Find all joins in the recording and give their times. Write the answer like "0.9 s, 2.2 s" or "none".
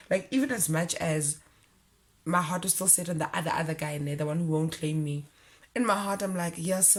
none

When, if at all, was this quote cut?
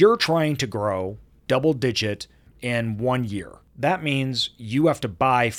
1.4 s, 2.5 s, 3.6 s

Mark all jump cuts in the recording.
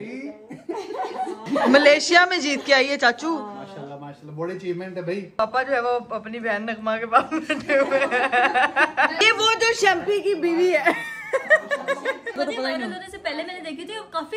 1.5 s, 5.4 s, 9.2 s, 12.4 s

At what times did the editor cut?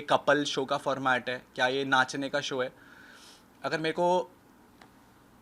none

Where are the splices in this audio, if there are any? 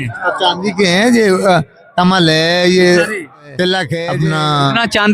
4.0 s

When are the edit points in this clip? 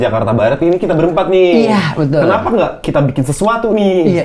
none

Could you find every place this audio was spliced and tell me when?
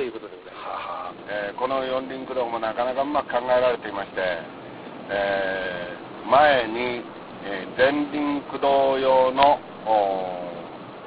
1.1 s

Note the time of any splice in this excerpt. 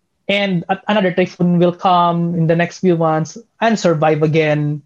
none

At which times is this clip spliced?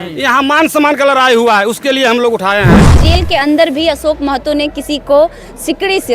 3.0 s

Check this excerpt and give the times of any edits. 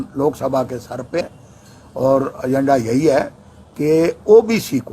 1.2 s

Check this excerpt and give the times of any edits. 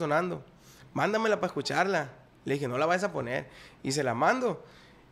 none

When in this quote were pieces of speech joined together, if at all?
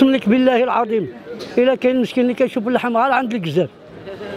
none

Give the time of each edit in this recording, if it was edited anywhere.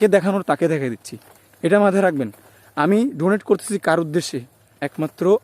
none

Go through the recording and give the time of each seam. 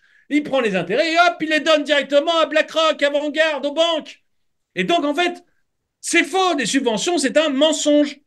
none

